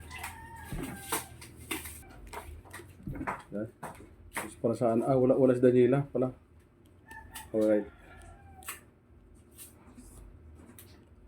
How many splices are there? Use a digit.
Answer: 1